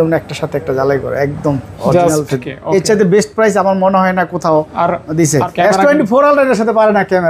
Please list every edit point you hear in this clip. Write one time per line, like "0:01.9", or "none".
0:02.5
0:05.5